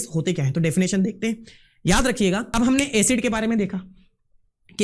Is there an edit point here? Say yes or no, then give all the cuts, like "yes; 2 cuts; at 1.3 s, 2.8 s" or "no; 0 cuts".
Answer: yes; 1 cut; at 2.5 s